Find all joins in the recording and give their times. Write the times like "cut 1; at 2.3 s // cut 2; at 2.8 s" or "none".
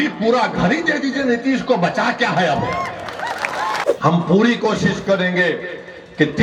cut 1; at 3.9 s